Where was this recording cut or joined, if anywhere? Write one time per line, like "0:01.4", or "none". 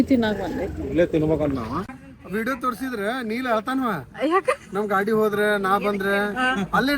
0:01.8

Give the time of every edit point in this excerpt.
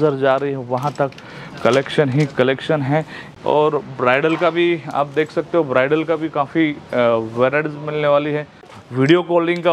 0:03.2
0:08.8

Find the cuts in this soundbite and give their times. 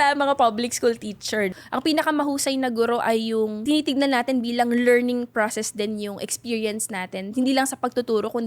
0:01.5
0:03.6

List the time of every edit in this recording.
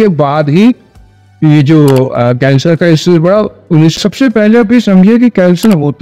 0:04.0

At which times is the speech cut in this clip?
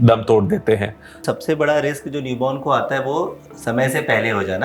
0:01.3

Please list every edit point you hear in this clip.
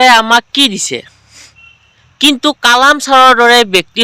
none

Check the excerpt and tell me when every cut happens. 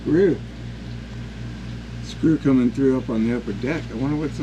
none

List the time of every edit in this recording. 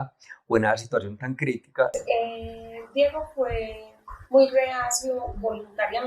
0:01.9

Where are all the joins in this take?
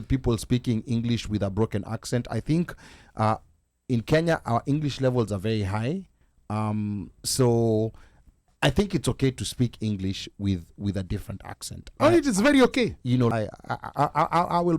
0:13.3

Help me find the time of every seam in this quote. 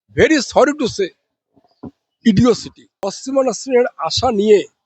0:03.1

